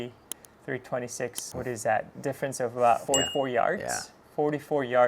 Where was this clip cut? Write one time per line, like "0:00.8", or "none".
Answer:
0:01.4
0:03.0